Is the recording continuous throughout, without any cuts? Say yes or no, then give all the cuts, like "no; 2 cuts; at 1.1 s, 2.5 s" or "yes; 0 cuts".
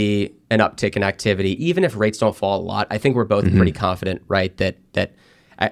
yes; 0 cuts